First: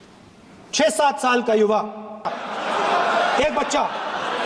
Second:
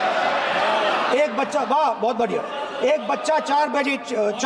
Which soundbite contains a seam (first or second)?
first